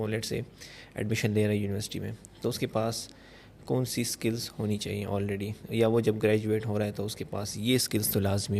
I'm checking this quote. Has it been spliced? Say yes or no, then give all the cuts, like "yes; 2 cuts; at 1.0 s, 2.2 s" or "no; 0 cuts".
no; 0 cuts